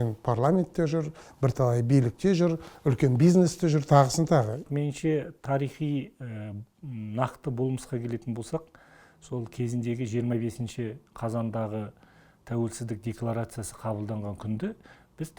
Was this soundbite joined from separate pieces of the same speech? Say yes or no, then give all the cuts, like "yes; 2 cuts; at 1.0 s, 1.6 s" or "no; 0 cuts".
yes; 1 cut; at 4.6 s